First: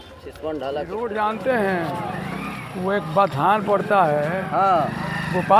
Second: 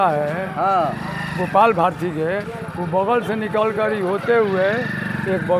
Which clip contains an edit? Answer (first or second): first